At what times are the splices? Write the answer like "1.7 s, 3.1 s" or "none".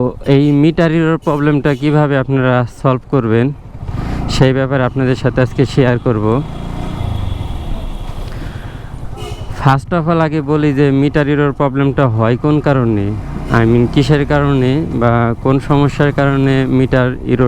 none